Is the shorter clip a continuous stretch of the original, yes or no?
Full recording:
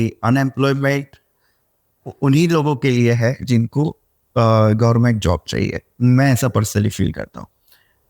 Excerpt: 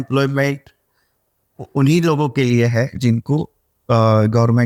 yes